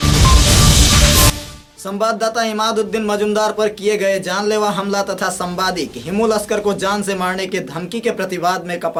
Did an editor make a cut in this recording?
no; 0 cuts

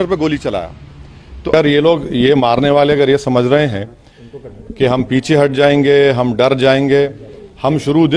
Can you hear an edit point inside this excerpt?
yes; 1 cut; at 1.5 s

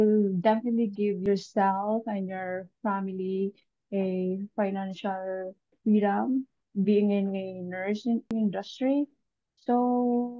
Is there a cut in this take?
yes; 3 cuts; at 1.2 s, 6.7 s, 8.3 s

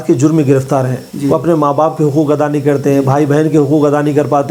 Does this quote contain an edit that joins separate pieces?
no; 0 cuts

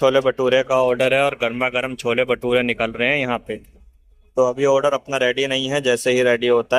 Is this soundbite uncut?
yes; 0 cuts

